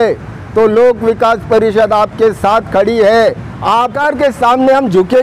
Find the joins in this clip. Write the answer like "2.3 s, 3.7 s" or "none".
3.9 s

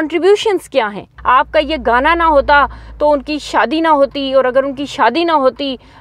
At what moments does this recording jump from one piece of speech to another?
1.1 s

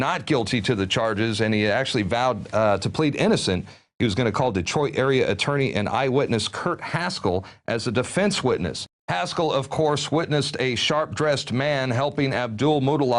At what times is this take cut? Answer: 11.8 s

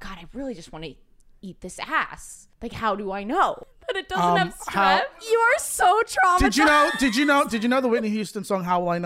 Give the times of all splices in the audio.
3.7 s, 5.2 s

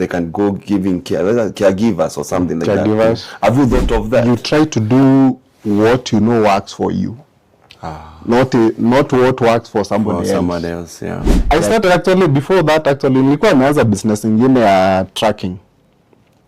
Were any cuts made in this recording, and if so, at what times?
4.2 s, 11.4 s

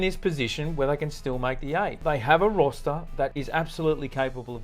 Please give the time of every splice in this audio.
2.0 s, 3.4 s

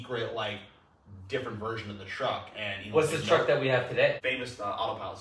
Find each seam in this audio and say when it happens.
4.2 s

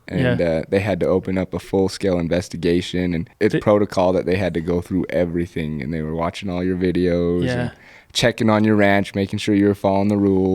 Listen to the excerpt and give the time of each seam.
3.3 s

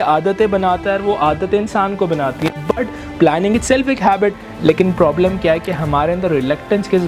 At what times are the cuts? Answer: 4.4 s

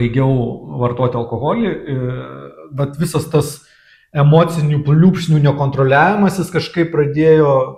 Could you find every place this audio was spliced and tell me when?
none

